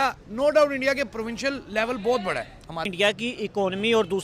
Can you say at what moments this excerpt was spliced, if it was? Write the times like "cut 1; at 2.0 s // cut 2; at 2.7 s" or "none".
cut 1; at 2.9 s